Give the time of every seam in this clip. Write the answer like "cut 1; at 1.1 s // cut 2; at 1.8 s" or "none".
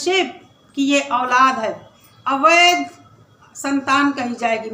none